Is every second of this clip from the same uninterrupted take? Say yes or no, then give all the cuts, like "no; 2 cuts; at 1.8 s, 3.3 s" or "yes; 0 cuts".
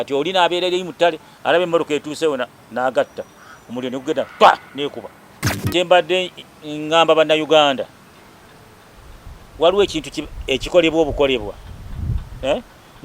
no; 1 cut; at 5.6 s